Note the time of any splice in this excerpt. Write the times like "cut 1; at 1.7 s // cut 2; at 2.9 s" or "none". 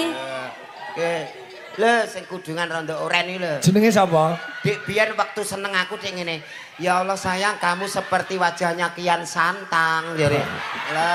none